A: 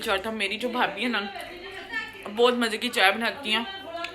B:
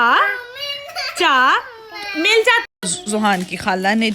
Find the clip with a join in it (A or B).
B